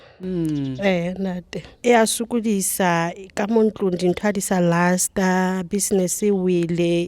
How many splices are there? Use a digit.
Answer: 1